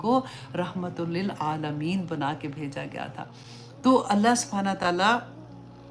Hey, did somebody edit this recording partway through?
no; 0 cuts

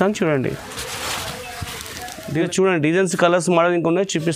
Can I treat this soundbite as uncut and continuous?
no; 1 cut; at 2.3 s

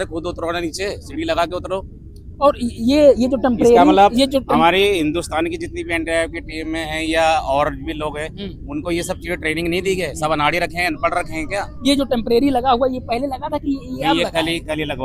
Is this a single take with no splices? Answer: yes; 0 cuts

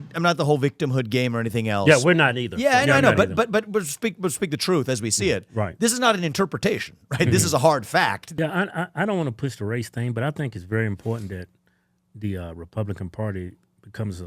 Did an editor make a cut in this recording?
yes; 1 cut; at 8.2 s

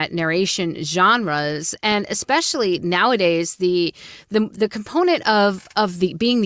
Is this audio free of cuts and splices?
yes; 0 cuts

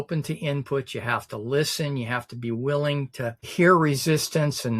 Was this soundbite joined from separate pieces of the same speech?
yes; 1 cut; at 3.4 s

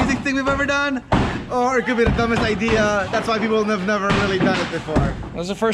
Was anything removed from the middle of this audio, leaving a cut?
no; 0 cuts

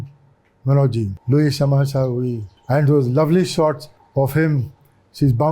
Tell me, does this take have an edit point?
yes; 3 cuts; at 1.2 s, 2.5 s, 3.9 s

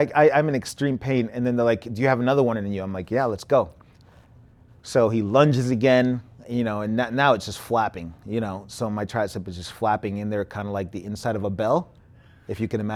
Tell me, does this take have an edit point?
no; 0 cuts

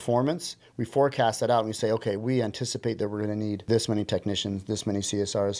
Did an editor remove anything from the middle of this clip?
yes; 2 cuts; at 2.2 s, 3.6 s

